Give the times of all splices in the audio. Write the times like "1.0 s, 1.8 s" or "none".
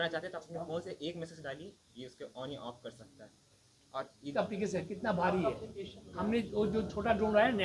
4.3 s